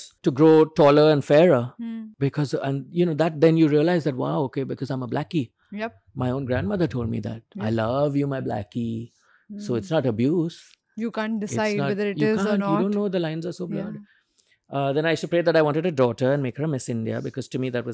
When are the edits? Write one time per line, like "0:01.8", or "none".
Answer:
none